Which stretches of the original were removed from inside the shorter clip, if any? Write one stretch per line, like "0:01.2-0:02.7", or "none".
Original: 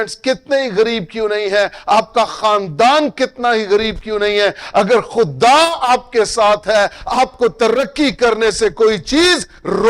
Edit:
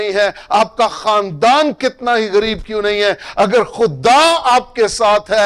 none